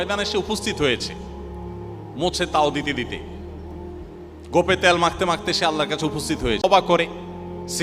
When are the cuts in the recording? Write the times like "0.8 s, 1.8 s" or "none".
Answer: 6.6 s